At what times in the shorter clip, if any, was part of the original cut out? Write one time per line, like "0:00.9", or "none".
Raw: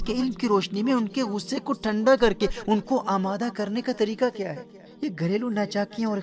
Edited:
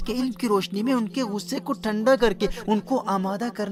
none